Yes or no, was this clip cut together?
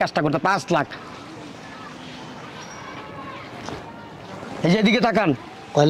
no